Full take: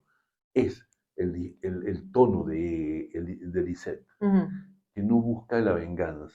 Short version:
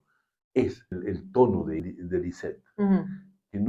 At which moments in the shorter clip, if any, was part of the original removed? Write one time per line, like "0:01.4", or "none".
0:00.9
0:01.8